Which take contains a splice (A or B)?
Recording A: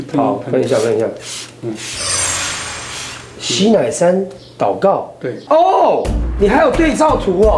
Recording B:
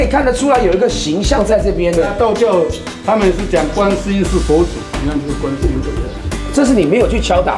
B